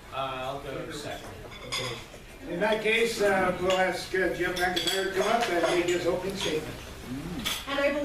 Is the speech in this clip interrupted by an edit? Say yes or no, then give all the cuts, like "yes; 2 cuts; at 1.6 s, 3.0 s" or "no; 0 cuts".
yes; 1 cut; at 3.5 s